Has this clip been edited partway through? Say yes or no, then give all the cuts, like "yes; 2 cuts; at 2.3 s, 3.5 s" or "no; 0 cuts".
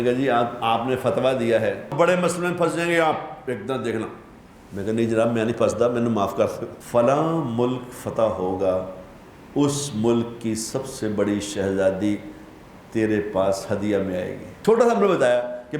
yes; 3 cuts; at 1.9 s, 6.7 s, 14.5 s